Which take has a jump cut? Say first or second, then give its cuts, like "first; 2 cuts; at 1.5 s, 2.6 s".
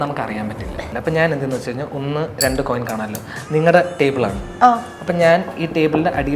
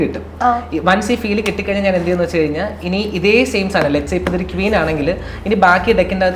first; 1 cut; at 0.9 s